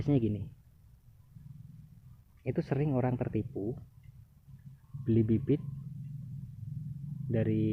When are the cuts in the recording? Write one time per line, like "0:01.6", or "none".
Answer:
none